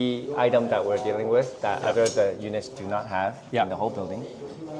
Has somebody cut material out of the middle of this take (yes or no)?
no